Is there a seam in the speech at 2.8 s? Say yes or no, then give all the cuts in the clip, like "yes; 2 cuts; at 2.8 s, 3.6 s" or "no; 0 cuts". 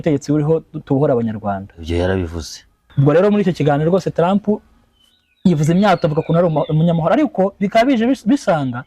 yes; 1 cut; at 2.8 s